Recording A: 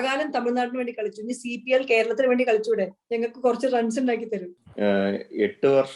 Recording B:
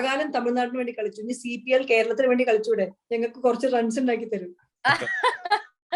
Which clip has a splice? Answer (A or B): A